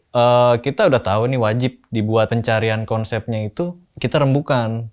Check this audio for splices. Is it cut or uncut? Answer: cut